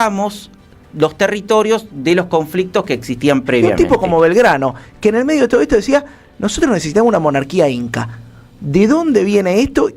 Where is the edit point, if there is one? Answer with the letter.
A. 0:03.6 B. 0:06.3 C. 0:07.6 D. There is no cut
A